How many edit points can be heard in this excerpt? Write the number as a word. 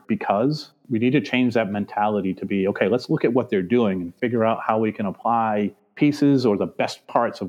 zero